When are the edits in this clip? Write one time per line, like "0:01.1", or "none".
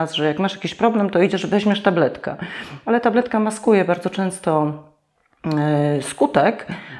none